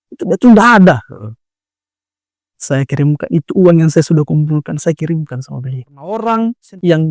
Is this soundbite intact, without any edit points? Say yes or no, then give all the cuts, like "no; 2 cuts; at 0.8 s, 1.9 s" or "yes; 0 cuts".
no; 1 cut; at 6.1 s